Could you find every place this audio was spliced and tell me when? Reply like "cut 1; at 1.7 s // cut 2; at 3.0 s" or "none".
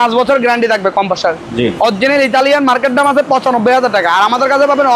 none